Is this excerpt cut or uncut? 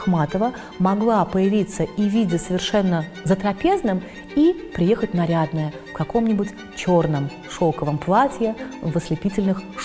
uncut